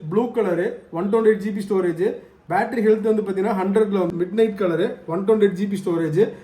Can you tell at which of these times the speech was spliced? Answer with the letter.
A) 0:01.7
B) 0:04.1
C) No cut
B